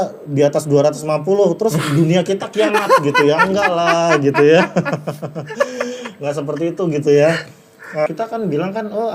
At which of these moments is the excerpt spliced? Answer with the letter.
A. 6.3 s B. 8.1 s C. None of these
B